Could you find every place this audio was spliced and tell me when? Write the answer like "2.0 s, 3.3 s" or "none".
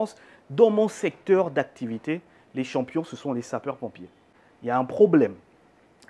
none

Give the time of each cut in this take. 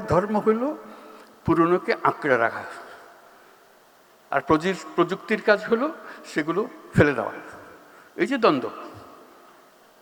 none

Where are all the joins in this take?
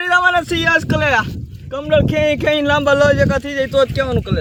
none

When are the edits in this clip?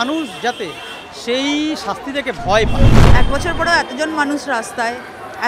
3.0 s

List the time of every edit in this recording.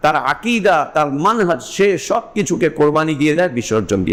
none

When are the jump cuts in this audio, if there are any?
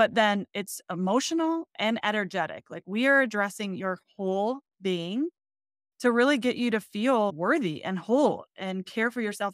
7.3 s

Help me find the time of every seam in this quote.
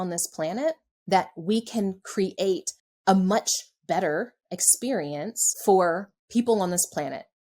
5.4 s, 6.1 s

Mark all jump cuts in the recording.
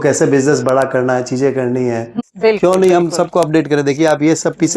2.1 s

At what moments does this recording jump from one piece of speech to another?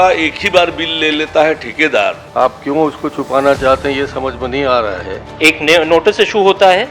2.2 s, 5.2 s

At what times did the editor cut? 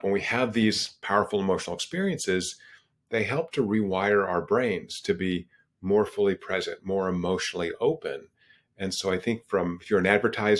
none

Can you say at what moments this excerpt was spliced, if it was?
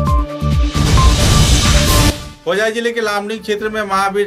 2.1 s

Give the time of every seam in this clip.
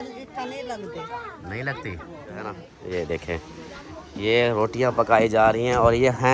2.7 s

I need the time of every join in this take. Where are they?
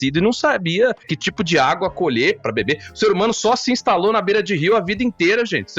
1.1 s, 2.4 s

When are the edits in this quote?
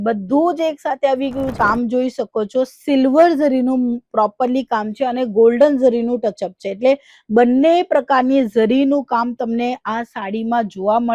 1.5 s

